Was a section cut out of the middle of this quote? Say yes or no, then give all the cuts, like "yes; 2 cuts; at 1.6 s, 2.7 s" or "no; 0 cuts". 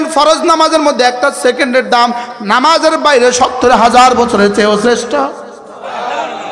no; 0 cuts